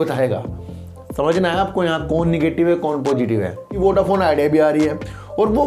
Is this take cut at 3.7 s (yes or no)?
yes